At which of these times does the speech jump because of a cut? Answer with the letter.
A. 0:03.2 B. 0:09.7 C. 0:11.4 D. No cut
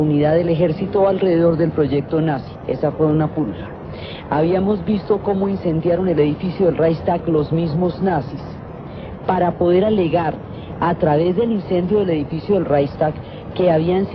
A